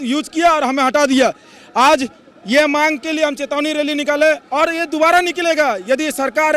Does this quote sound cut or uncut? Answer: uncut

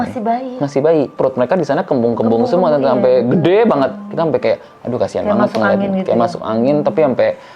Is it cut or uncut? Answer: cut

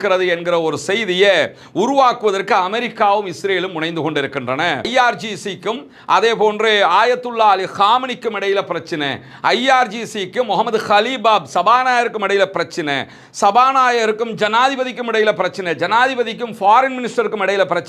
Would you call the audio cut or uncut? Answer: uncut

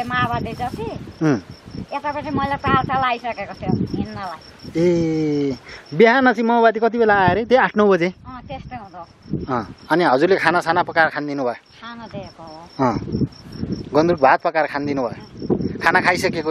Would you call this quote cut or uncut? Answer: uncut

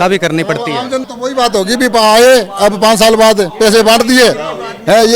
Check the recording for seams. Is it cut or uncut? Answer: cut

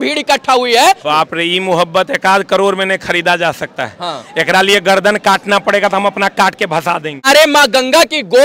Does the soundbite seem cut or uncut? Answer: cut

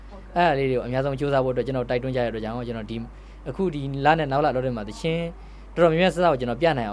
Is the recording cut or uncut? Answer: uncut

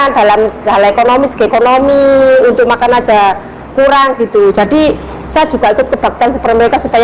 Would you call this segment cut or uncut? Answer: uncut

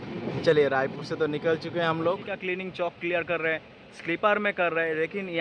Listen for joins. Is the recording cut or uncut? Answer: cut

